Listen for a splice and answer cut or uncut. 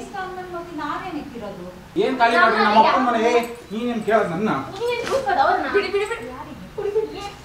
cut